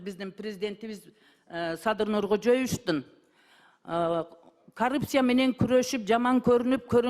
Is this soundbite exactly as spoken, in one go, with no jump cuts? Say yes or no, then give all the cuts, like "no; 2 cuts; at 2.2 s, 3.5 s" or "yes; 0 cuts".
yes; 0 cuts